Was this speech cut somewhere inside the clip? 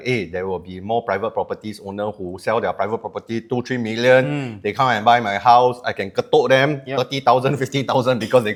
no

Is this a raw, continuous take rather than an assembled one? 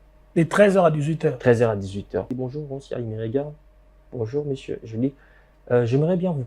no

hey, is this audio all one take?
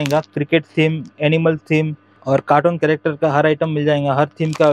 no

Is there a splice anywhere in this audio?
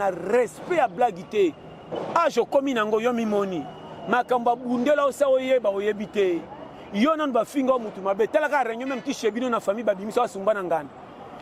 no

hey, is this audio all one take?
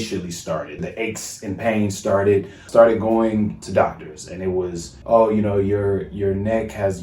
no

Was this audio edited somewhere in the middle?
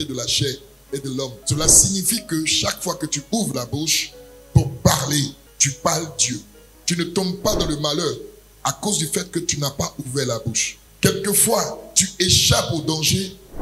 yes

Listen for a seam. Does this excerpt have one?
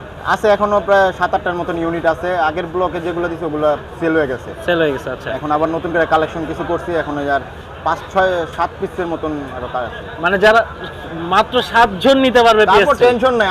no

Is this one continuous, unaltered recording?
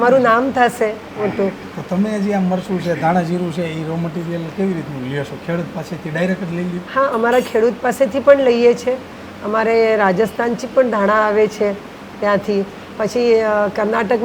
yes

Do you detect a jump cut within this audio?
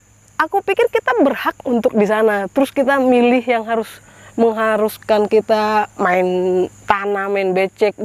no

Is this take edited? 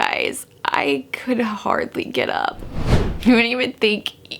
yes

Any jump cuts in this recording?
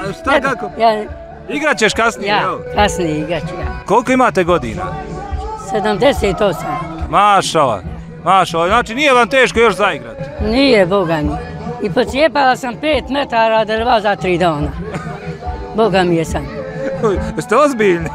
no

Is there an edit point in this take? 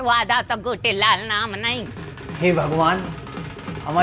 yes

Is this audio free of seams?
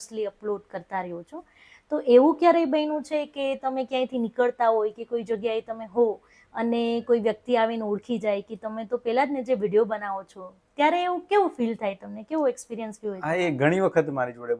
yes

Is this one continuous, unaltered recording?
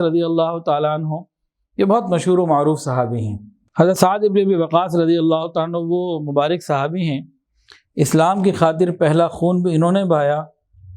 no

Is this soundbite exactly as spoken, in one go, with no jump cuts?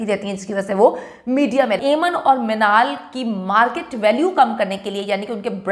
no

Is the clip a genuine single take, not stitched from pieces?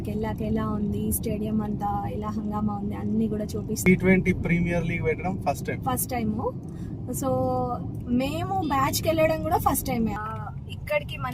no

